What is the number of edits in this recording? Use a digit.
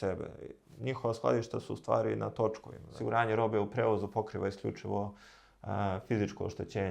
1